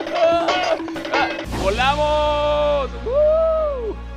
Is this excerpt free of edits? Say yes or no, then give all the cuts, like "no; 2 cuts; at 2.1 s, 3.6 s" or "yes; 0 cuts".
no; 1 cut; at 1.4 s